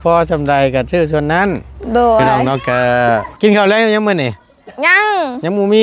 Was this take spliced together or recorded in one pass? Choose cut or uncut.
cut